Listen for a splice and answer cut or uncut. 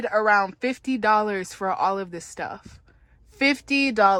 uncut